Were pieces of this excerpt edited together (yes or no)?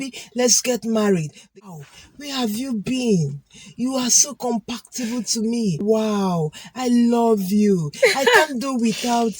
yes